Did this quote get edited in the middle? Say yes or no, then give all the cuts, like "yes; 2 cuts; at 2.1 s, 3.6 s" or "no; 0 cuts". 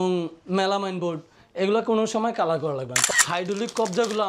yes; 1 cut; at 3.0 s